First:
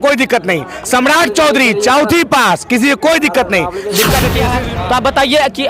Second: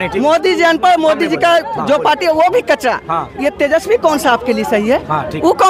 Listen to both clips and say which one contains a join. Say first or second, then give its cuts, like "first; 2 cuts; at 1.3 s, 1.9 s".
first; 1 cut; at 4.5 s